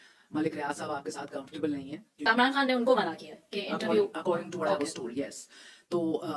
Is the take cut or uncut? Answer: cut